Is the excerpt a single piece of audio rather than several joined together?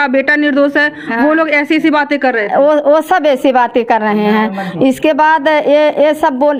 yes; 0 cuts

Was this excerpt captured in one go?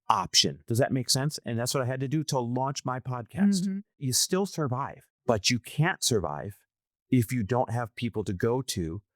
no; 2 cuts; at 4.0 s, 5.1 s

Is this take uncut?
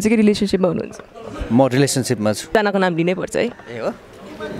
no; 1 cut; at 2.5 s

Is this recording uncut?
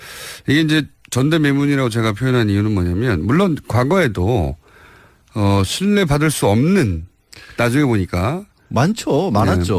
yes; 0 cuts

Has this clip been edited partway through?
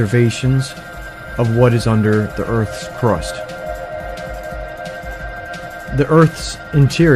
yes; 1 cut; at 5.8 s

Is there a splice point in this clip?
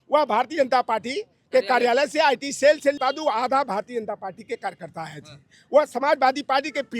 yes; 1 cut; at 3.0 s

